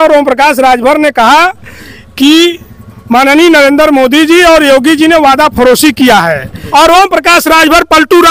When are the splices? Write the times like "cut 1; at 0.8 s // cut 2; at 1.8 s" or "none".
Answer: cut 1; at 6.6 s